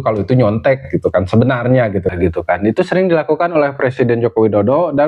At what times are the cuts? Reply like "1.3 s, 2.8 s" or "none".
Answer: 2.1 s